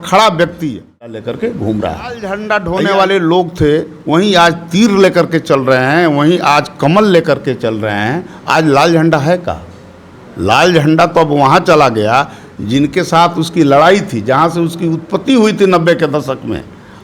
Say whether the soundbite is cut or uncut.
cut